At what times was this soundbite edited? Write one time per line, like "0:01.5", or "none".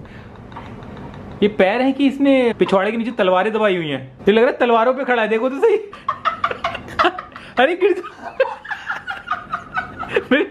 0:02.5
0:05.9